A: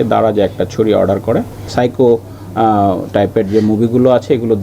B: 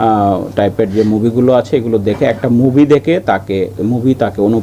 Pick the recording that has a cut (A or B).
A